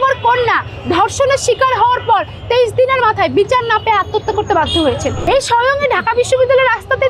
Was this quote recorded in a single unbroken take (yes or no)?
no